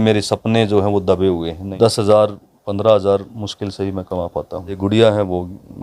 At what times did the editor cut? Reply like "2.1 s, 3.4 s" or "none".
1.6 s, 4.8 s